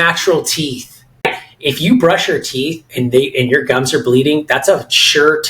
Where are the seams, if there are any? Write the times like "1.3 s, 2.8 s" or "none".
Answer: 1.4 s